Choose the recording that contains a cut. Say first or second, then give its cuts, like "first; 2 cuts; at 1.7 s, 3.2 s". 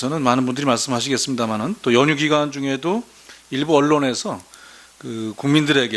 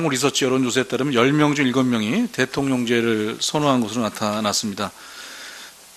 first; 1 cut; at 2.5 s